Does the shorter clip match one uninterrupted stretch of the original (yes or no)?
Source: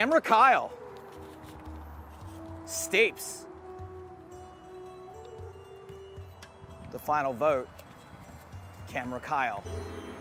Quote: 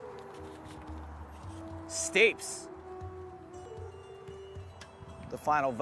no